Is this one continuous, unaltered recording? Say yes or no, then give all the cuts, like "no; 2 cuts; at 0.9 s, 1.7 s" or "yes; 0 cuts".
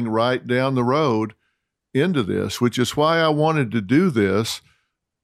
yes; 0 cuts